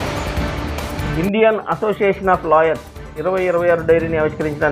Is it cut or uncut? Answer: uncut